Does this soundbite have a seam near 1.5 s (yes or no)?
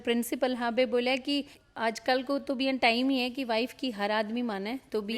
yes